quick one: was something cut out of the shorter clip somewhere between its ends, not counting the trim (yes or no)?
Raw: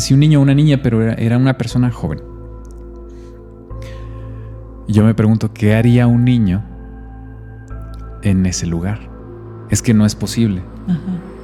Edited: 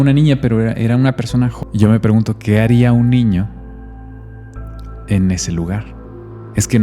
yes